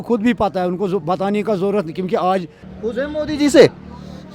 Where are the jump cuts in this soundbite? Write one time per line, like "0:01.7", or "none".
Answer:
0:02.6